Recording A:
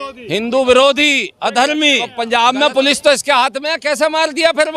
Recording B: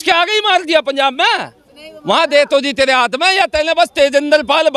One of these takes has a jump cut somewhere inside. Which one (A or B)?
A